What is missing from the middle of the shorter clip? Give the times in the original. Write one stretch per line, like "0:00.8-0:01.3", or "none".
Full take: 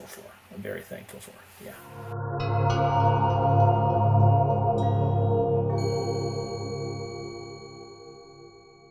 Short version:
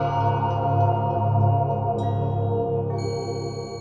none